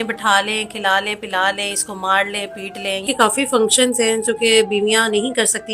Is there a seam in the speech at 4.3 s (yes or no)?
no